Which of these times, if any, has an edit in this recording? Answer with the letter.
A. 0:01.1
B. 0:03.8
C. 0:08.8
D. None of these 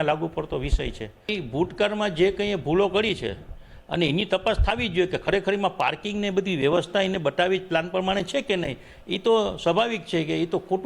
A